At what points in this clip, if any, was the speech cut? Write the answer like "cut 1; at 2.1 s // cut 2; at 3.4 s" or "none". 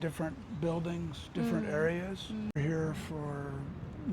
cut 1; at 2.5 s

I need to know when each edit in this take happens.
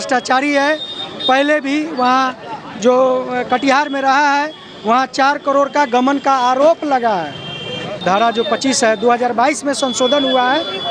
cut 1; at 8.0 s

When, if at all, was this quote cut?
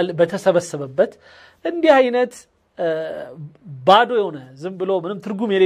none

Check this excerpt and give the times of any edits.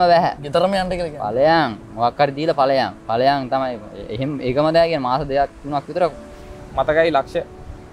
cut 1; at 6.7 s

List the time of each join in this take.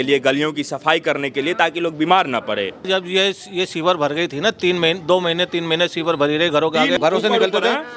cut 1; at 2.9 s // cut 2; at 7.0 s

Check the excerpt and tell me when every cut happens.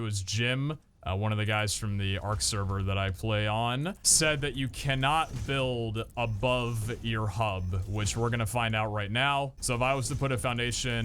cut 1; at 4.0 s // cut 2; at 9.6 s

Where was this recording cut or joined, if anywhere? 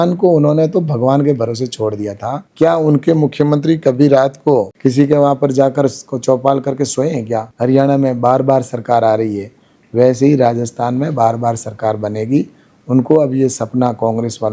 cut 1; at 2.4 s // cut 2; at 7.5 s

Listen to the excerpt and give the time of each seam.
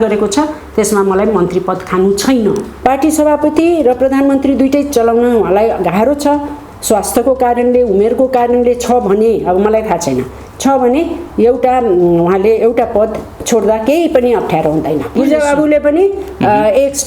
cut 1; at 2.7 s // cut 2; at 15.2 s

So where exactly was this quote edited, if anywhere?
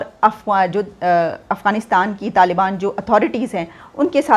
none

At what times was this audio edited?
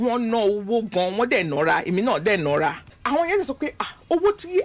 cut 1; at 3.0 s

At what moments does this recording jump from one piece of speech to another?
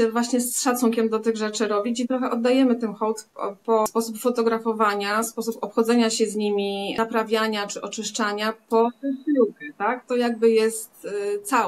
none

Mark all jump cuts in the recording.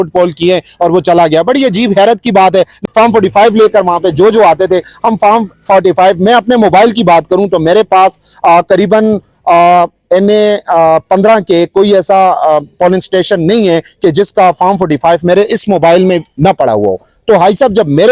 cut 1; at 2.8 s

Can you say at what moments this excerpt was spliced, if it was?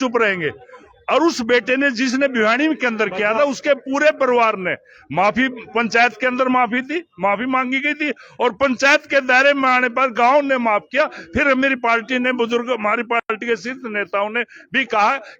none

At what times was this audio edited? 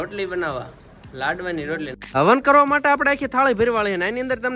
cut 1; at 2.2 s

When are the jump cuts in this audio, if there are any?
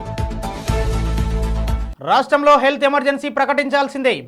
cut 1; at 1.8 s

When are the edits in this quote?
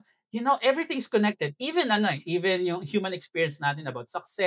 none

